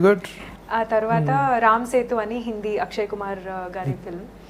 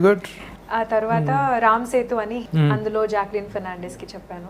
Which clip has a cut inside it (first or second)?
second